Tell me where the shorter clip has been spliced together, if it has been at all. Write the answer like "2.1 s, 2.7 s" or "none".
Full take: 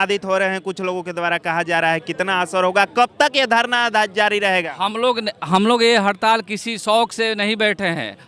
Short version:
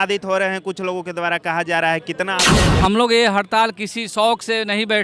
2.5 s